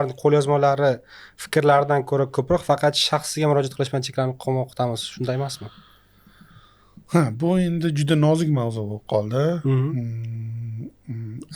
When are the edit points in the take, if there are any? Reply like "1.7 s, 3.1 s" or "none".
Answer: none